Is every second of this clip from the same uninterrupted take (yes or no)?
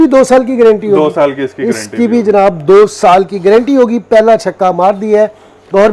yes